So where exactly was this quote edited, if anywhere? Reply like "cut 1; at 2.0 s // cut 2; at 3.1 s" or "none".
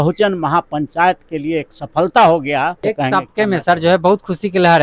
cut 1; at 2.8 s